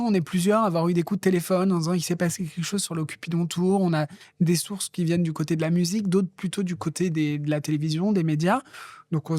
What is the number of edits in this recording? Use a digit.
0